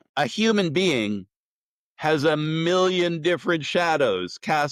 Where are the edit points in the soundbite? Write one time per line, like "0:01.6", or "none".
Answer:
none